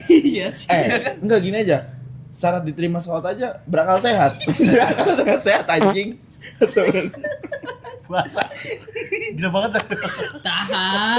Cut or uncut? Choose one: uncut